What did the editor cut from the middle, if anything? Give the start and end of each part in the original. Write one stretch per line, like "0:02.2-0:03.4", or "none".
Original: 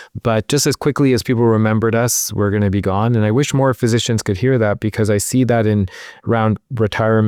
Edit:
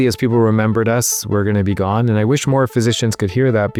none